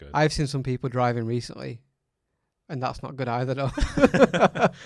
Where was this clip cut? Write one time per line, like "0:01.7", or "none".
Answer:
none